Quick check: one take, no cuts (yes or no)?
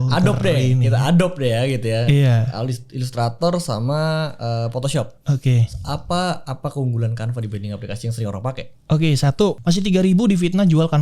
no